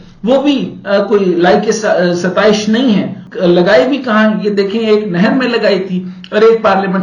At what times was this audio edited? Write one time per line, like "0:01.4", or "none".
0:03.2